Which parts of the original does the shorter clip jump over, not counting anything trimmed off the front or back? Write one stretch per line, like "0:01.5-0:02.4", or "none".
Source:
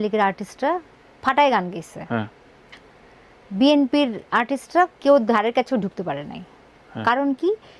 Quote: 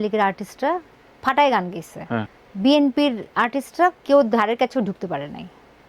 0:02.4-0:03.4